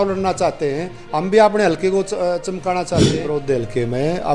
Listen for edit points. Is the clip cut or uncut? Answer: cut